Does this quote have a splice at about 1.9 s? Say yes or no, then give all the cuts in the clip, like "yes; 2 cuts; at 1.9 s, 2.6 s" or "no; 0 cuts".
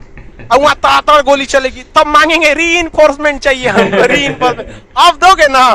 no; 0 cuts